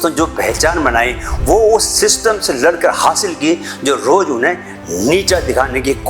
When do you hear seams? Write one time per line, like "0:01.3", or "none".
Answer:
none